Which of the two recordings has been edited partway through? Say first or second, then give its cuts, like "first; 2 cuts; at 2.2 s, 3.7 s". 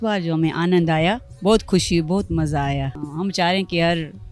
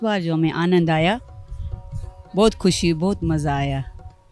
first; 2 cuts; at 1.3 s, 3.0 s